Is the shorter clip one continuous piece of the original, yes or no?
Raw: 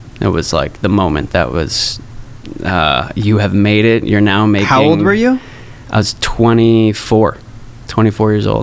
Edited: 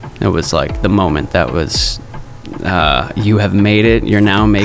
yes